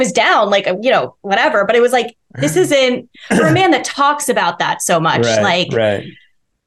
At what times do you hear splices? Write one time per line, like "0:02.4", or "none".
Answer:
none